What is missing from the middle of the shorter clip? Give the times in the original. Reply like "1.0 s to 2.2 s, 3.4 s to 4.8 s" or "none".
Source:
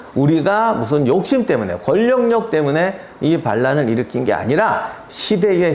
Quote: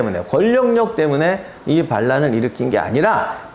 none